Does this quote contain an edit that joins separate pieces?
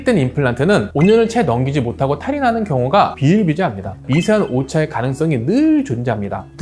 yes; 1 cut; at 4.0 s

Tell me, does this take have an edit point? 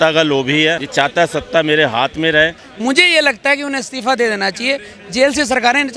yes; 2 cuts; at 0.8 s, 2.6 s

